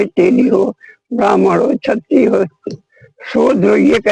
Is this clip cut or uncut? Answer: uncut